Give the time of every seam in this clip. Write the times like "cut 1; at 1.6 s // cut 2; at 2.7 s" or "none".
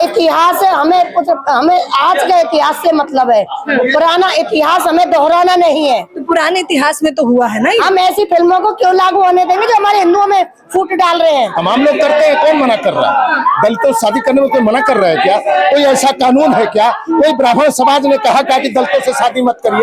cut 1; at 11.5 s